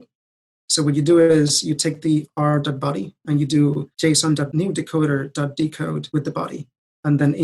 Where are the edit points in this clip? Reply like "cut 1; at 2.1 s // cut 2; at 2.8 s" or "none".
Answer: cut 1; at 4.3 s // cut 2; at 6.0 s